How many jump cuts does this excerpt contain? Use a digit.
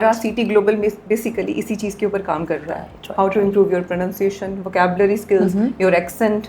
0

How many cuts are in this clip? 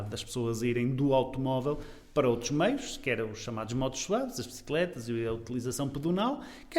0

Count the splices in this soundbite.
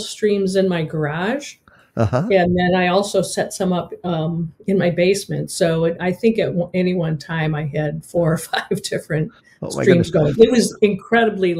0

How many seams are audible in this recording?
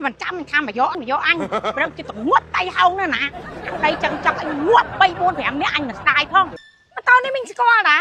2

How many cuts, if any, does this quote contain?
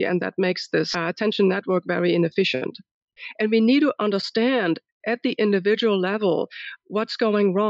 2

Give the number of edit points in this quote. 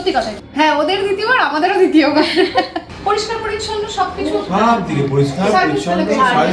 1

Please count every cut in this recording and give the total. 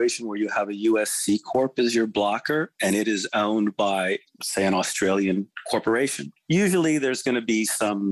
1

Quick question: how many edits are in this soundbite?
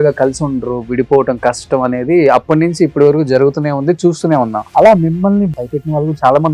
2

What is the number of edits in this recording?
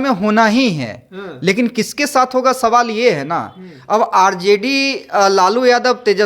0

